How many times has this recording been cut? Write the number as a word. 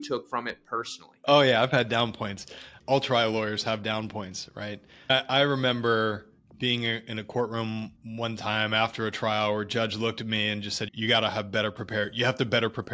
three